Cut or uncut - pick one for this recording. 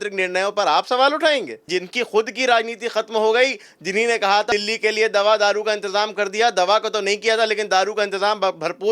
cut